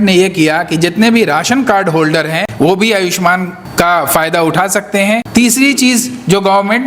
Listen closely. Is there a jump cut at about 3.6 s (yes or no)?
yes